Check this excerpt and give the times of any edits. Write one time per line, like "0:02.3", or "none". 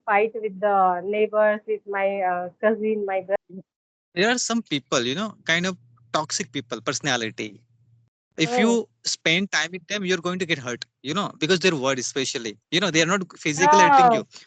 0:03.4